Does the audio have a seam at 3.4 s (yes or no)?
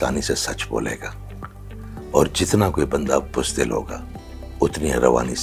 no